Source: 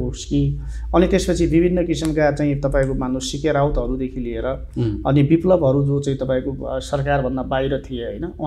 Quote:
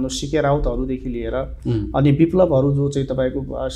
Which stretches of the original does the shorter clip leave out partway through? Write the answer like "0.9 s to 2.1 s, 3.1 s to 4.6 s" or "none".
none